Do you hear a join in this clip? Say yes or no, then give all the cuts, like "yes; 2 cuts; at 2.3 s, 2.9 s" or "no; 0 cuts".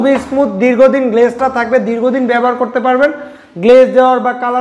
no; 0 cuts